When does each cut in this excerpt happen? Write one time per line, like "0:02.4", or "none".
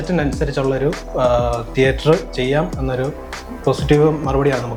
none